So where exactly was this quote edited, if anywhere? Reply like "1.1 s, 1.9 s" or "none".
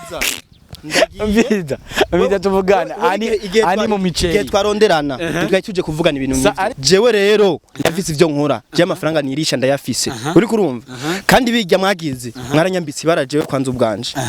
6.8 s